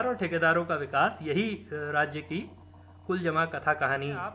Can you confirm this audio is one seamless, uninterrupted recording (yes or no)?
yes